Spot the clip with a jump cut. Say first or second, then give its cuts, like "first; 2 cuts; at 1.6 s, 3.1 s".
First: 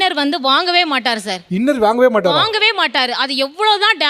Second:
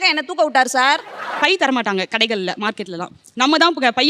second; 1 cut; at 1.2 s